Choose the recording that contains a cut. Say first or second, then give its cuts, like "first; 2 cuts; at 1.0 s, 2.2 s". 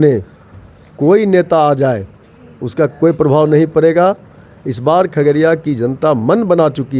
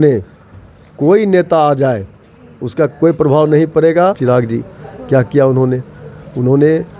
second; 1 cut; at 4.2 s